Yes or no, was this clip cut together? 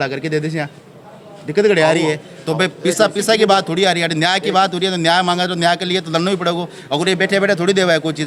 no